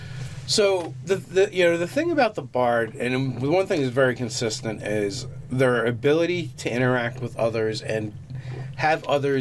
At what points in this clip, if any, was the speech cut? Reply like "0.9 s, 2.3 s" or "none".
none